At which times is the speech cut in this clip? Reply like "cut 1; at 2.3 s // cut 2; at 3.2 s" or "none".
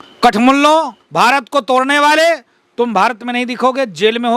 cut 1; at 1.0 s